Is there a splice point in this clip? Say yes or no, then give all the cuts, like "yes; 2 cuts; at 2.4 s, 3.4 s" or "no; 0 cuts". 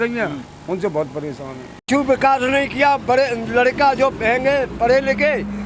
yes; 1 cut; at 1.9 s